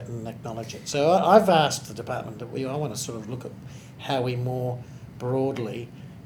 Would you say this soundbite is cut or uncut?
uncut